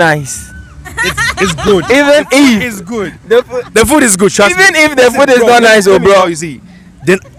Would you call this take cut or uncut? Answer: uncut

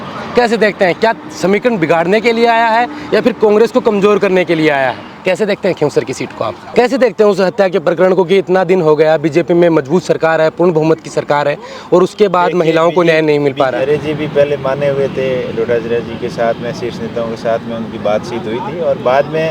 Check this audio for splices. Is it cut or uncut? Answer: cut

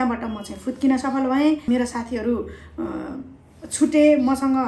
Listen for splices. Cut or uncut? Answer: cut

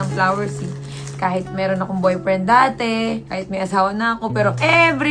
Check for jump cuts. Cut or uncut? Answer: uncut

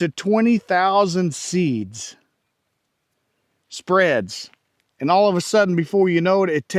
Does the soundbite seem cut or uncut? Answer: uncut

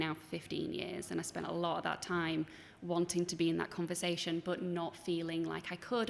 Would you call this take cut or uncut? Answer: uncut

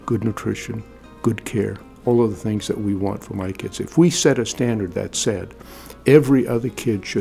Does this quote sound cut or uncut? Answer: uncut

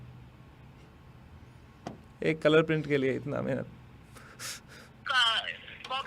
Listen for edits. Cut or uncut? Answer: cut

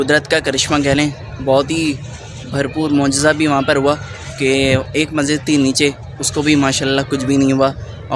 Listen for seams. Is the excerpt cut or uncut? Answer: uncut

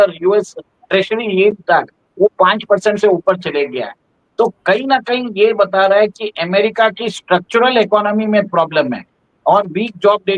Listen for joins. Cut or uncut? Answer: uncut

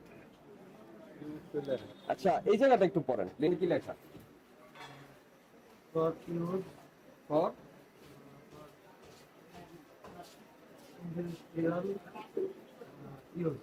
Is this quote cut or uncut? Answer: uncut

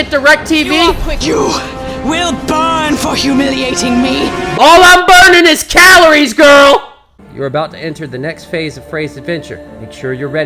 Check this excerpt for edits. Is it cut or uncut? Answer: cut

